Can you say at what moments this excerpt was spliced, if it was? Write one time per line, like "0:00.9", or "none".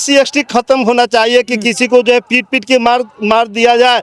none